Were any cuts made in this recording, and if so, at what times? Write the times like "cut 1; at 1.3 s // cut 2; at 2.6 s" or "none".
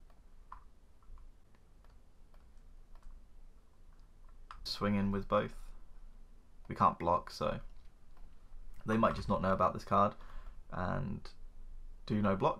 cut 1; at 1.9 s // cut 2; at 4.7 s

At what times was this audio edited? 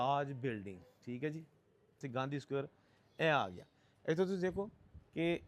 cut 1; at 2.0 s

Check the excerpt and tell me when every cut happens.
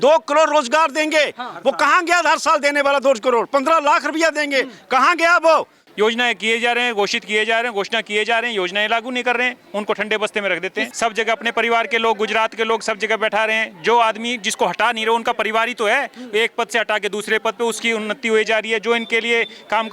cut 1; at 5.8 s // cut 2; at 10.9 s

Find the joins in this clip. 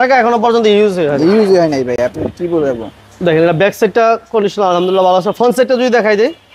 none

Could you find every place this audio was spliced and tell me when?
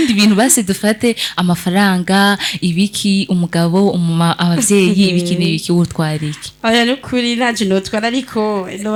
none

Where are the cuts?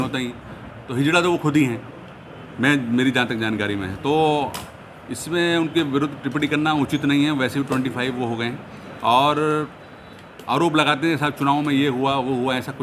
none

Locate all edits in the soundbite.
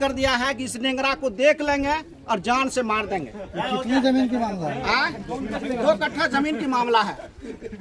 none

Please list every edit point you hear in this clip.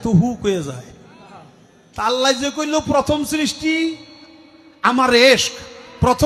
none

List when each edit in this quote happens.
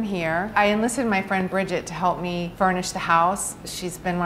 cut 1; at 2.5 s

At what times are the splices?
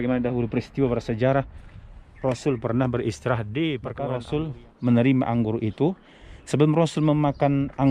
cut 1; at 4.2 s

